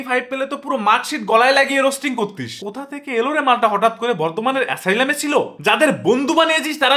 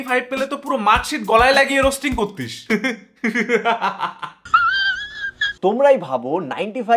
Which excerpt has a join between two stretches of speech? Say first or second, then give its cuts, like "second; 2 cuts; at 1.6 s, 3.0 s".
first; 2 cuts; at 2.6 s, 5.5 s